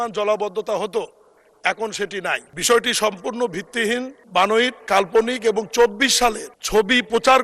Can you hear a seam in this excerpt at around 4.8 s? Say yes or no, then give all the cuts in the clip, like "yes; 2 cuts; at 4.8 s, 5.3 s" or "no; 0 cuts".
yes; 4 cuts; at 2.5 s, 4.2 s, 4.8 s, 6.5 s